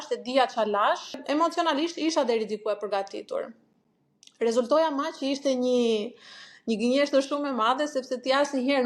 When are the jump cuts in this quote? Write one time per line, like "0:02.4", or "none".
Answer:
0:01.2

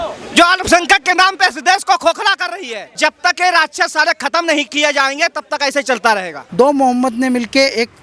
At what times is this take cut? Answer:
0:02.8
0:06.4

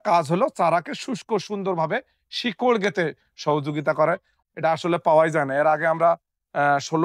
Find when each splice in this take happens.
0:04.3

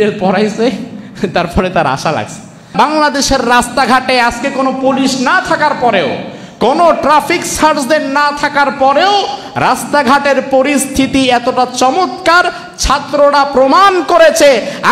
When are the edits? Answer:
0:02.7

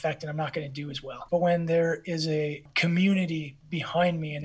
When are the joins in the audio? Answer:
0:01.1
0:02.6

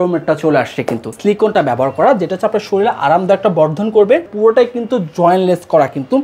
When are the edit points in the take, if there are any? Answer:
0:01.1
0:04.3

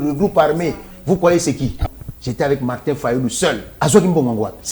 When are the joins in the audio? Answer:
0:01.8
0:03.7

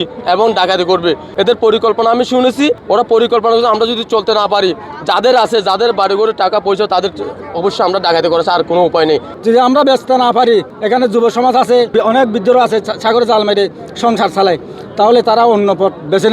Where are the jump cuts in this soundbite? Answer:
0:02.8
0:09.3
0:10.7
0:11.9

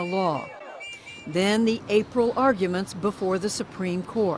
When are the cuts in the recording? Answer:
0:02.8

